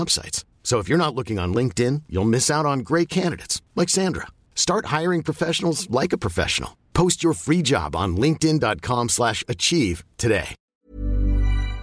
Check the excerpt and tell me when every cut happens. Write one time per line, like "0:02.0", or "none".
0:10.7